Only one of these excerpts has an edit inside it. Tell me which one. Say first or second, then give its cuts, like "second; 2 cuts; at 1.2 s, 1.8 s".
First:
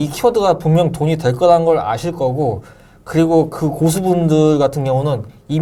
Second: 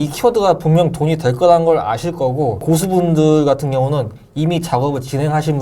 second; 1 cut; at 2.6 s